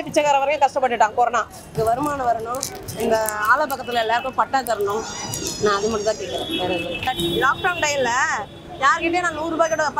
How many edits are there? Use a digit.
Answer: 2